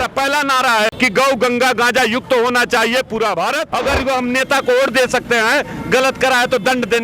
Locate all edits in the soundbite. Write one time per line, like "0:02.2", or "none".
0:00.9
0:03.7